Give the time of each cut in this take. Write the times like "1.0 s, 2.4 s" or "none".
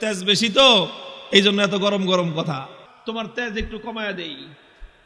2.8 s